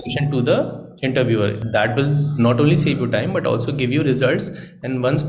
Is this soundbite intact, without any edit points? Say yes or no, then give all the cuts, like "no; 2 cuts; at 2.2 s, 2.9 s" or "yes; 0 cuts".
no; 1 cut; at 1.6 s